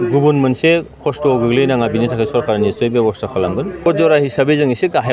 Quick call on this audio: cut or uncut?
cut